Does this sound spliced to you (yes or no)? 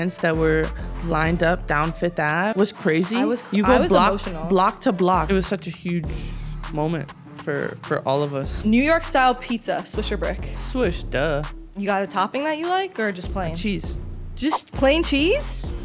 yes